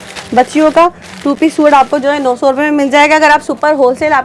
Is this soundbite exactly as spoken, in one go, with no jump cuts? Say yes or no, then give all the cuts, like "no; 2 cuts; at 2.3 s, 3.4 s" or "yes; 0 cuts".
yes; 0 cuts